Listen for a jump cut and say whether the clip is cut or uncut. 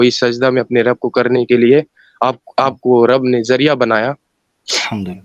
uncut